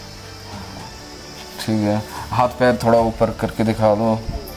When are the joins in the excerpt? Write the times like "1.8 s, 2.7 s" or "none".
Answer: none